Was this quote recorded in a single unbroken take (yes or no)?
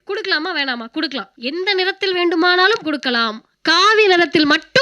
no